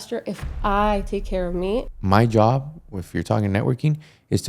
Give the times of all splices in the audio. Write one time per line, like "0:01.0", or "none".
0:01.9